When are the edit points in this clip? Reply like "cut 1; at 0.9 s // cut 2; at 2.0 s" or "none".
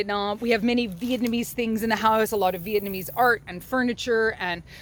none